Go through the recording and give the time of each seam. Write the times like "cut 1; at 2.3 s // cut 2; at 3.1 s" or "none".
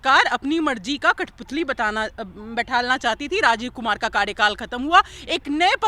none